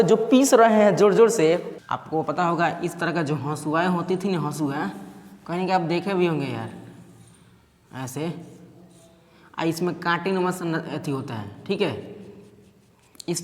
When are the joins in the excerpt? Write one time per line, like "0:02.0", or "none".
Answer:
0:01.7